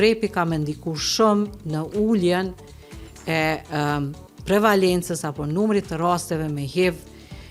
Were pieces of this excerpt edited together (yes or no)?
no